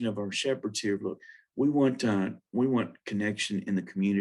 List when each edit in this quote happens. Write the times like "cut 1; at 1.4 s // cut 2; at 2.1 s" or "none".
none